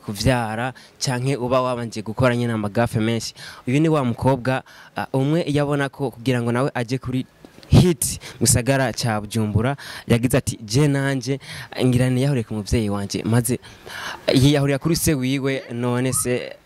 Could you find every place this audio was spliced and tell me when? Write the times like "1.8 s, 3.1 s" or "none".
none